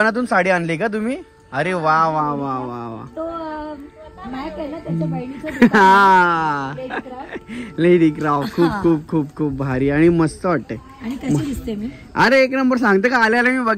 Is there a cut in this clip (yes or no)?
no